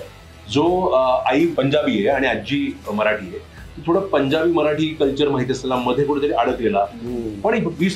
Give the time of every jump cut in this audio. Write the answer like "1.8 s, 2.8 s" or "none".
1.5 s